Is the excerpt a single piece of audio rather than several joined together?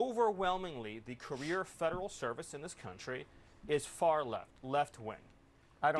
yes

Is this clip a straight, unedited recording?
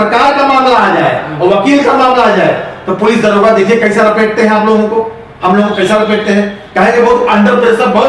yes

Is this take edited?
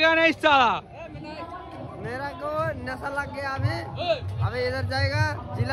no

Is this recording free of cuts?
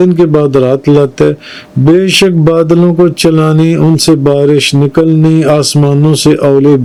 yes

